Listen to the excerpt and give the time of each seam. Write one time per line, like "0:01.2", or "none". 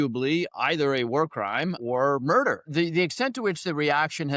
0:01.8
0:02.7